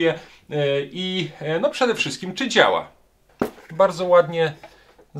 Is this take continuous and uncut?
no; 1 cut; at 3.2 s

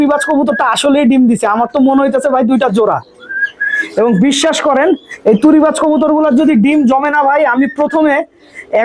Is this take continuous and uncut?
yes; 0 cuts

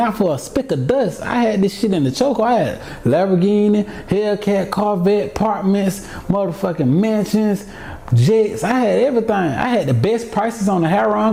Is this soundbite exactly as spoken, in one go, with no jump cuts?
yes; 0 cuts

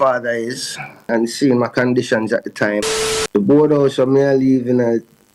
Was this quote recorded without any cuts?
no; 2 cuts; at 1.1 s, 2.8 s

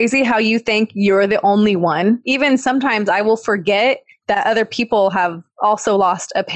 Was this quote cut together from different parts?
yes; 1 cut; at 2.2 s

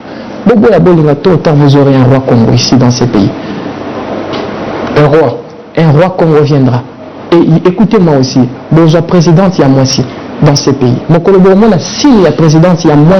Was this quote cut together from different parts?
no; 0 cuts

